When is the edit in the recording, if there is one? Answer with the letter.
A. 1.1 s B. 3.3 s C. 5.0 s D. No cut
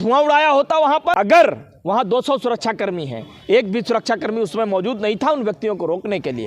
A